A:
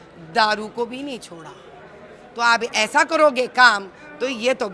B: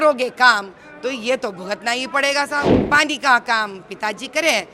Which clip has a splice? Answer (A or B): B